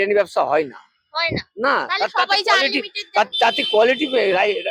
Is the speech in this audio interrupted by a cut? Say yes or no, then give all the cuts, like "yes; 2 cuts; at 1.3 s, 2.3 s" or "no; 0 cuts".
no; 0 cuts